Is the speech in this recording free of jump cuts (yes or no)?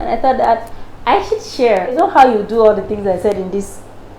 no